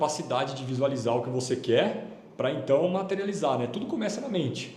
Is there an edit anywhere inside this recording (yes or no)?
no